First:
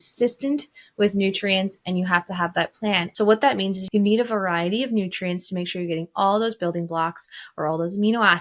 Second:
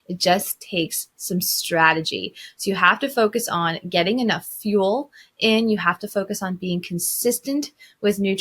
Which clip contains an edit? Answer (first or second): first